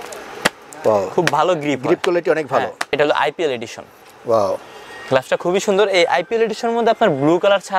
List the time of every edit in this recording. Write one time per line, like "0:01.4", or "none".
0:02.9